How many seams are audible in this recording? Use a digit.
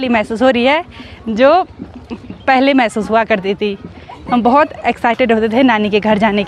0